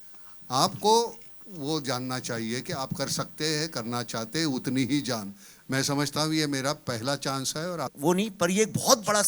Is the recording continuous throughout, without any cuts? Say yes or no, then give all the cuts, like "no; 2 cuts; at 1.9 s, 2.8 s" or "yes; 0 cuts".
no; 1 cut; at 7.9 s